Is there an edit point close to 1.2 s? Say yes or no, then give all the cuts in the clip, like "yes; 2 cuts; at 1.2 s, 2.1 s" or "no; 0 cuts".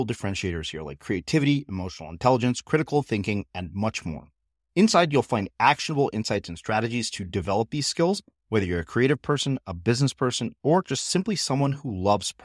no; 0 cuts